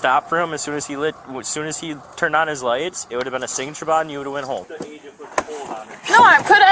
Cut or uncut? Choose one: cut